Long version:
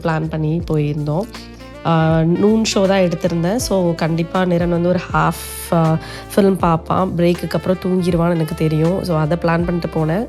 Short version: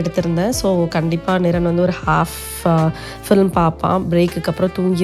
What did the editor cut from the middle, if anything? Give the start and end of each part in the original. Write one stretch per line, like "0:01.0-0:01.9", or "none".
none